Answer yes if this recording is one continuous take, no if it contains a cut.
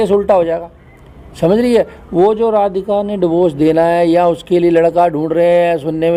yes